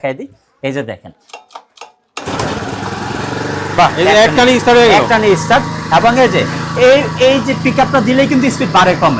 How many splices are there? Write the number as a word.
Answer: zero